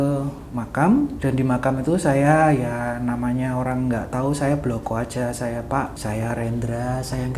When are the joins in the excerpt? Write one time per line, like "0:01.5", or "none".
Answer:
0:01.2
0:06.0